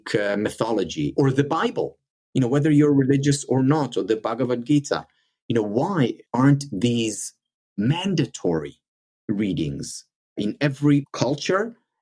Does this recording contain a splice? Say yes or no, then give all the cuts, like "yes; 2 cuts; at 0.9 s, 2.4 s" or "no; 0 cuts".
yes; 4 cuts; at 1.1 s, 6.2 s, 10.4 s, 11.1 s